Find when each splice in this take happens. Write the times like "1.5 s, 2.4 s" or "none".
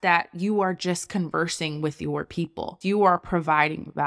2.7 s

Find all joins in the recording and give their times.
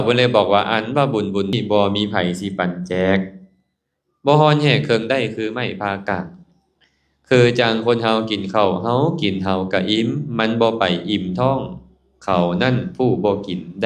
1.5 s

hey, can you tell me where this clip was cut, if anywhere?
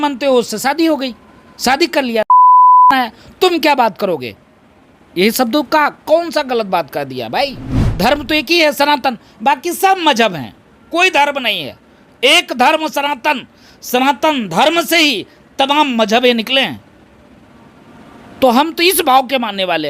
7.8 s

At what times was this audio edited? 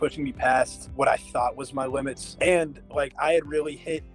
none

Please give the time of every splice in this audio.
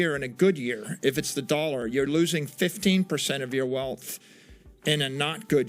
none

